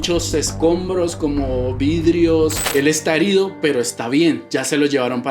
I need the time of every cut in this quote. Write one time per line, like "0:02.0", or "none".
0:02.7

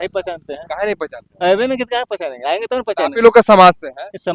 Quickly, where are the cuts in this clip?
none

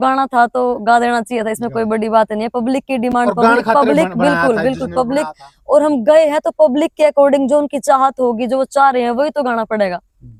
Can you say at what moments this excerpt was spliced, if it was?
none

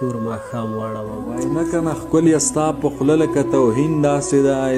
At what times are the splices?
0:01.5

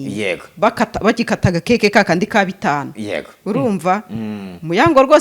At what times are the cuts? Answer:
none

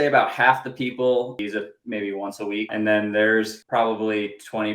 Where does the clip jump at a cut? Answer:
0:01.4
0:02.7
0:03.6

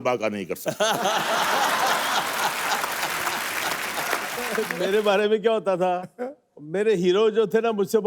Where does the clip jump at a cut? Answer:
0:04.5

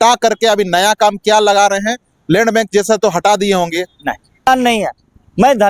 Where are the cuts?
0:04.5

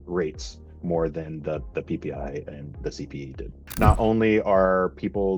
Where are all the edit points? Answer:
0:03.6

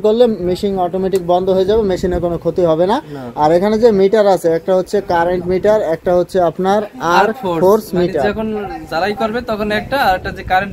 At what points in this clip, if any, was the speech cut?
none

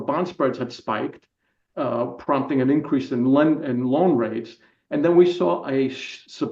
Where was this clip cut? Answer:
none

